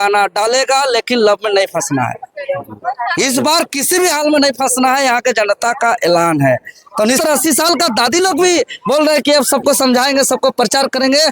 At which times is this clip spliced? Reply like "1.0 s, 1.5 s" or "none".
7.2 s